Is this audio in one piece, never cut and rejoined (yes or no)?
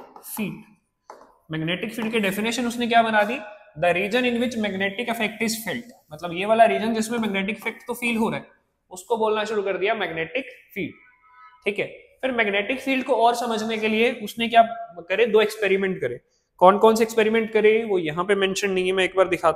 yes